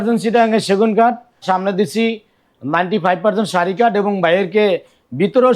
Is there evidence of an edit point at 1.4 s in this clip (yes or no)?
yes